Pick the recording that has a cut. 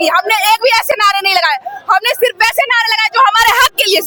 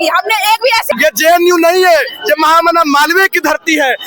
second; 1 cut; at 0.9 s

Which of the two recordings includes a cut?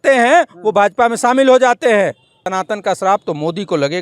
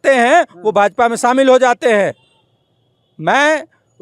first; 1 cut; at 2.4 s

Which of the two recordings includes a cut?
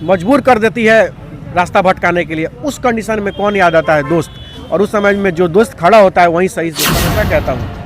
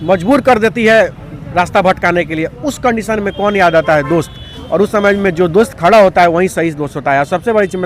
first; 1 cut; at 6.9 s

